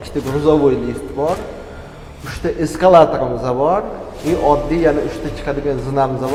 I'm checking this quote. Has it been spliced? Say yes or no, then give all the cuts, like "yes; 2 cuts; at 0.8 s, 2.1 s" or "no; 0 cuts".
no; 0 cuts